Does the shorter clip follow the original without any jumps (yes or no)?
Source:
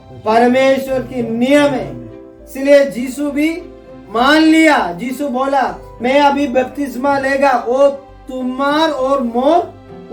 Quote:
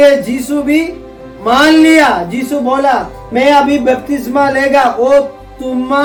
yes